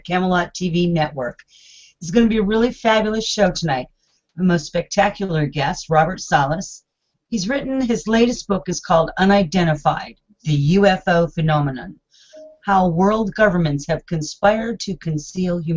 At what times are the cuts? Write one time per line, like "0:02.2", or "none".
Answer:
0:05.4